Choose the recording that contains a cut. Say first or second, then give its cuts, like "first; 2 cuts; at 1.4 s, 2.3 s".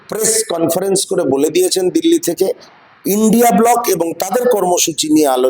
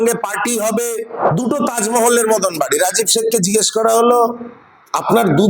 second; 1 cut; at 1.3 s